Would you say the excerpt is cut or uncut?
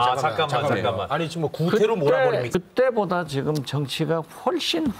cut